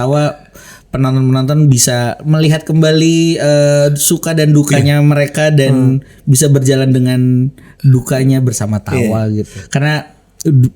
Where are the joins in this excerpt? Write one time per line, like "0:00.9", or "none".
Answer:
0:09.5